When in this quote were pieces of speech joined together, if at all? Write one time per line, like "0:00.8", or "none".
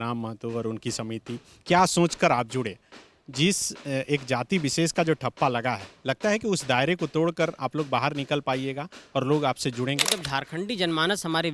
0:10.2